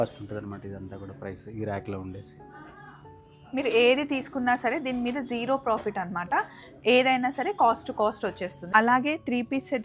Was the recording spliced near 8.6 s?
yes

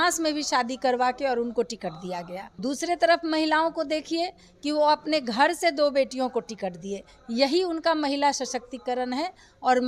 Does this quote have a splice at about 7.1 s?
no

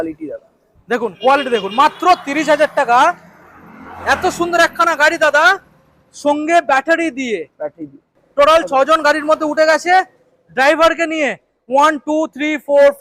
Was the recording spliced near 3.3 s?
no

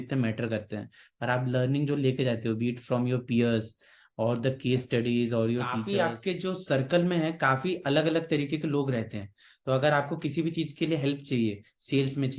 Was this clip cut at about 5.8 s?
yes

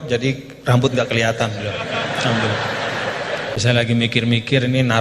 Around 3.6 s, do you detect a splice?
yes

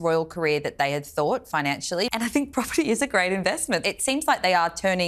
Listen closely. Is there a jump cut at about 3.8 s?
yes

